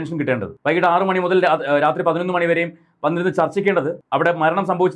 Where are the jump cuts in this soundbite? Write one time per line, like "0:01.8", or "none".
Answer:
none